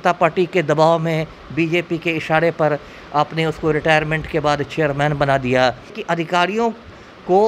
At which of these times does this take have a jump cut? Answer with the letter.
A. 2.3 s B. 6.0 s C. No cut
B